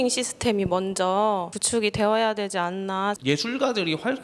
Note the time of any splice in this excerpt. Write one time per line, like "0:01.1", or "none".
0:01.5
0:03.2

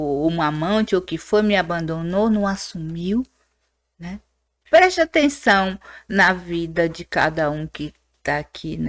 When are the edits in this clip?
0:04.6

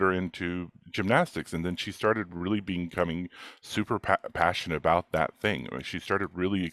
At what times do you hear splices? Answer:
none

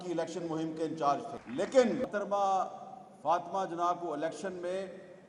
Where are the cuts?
0:01.4
0:02.1

